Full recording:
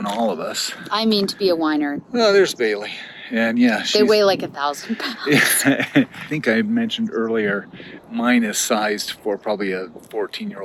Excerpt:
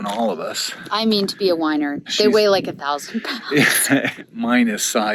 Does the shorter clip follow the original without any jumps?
no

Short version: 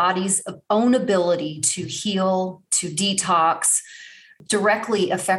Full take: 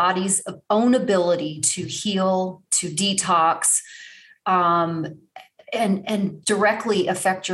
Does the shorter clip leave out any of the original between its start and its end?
yes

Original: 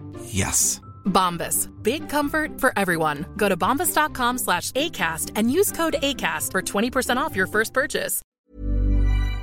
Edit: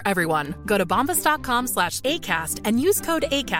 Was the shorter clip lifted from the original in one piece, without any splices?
yes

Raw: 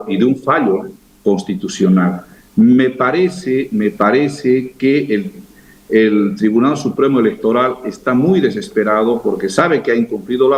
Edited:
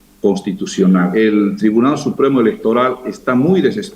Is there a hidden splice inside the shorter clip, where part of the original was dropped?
yes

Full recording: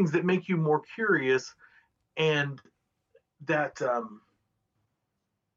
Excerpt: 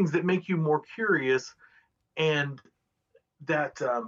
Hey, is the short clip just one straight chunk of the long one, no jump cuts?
yes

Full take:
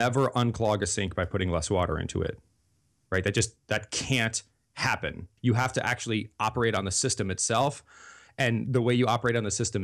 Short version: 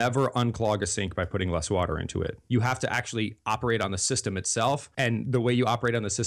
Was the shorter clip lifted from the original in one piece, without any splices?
no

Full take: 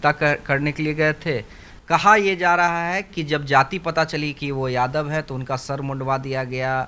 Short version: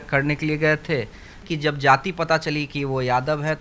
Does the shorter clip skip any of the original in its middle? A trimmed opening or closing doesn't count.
yes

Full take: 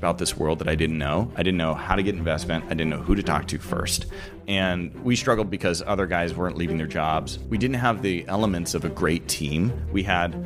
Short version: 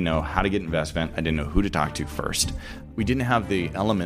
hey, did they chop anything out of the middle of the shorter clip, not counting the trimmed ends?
yes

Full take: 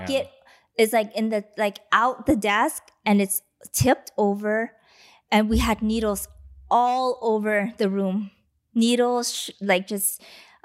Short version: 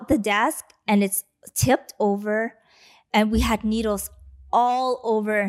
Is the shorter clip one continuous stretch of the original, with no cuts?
yes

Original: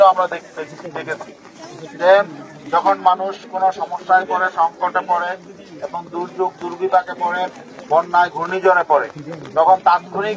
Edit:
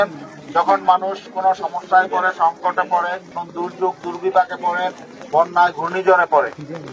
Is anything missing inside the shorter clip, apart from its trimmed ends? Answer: yes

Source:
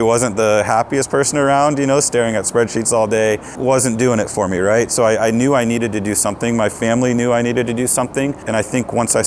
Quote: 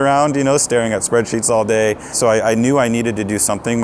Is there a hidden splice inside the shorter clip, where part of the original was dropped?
yes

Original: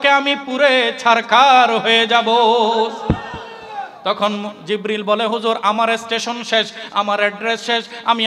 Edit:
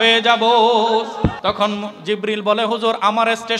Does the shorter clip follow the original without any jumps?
no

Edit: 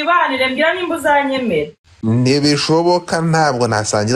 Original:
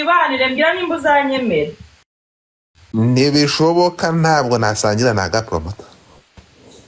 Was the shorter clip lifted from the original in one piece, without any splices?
no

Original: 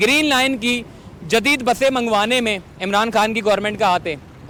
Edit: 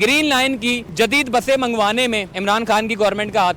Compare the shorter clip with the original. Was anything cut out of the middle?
yes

